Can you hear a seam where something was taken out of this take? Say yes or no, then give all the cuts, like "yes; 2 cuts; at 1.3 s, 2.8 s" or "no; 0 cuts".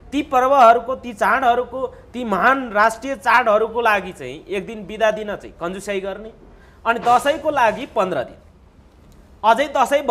no; 0 cuts